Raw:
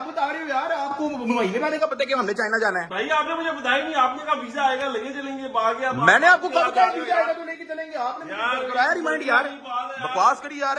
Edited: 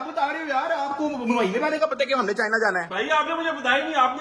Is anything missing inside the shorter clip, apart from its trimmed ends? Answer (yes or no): no